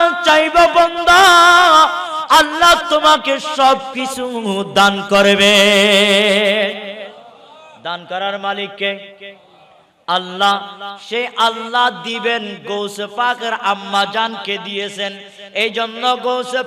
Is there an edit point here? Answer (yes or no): no